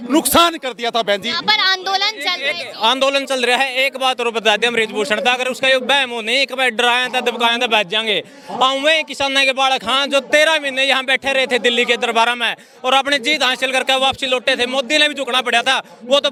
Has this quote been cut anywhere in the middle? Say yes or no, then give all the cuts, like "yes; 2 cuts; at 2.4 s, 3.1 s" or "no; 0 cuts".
no; 0 cuts